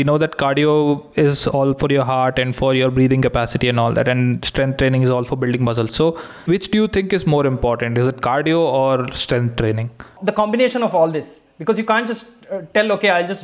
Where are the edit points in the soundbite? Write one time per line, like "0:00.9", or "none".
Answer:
0:06.4
0:10.2